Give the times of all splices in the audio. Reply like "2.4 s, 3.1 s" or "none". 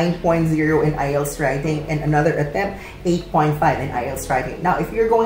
none